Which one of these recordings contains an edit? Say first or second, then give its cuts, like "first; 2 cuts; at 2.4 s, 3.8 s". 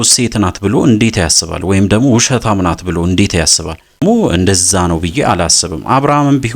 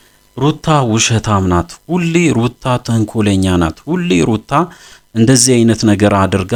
first; 1 cut; at 4.0 s